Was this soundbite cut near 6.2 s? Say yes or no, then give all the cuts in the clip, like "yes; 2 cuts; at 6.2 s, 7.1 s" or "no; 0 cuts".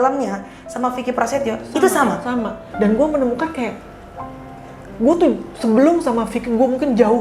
no; 1 cut; at 2.6 s